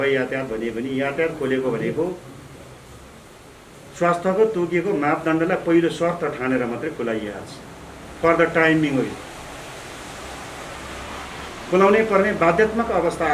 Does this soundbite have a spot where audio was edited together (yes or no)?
no